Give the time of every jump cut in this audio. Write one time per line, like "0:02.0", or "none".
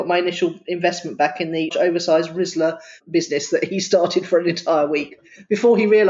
0:01.7
0:03.0